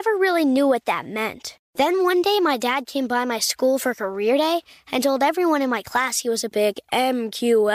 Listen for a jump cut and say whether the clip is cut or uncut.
uncut